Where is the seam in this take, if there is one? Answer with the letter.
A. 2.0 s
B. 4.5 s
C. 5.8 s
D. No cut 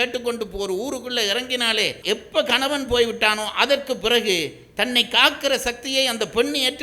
A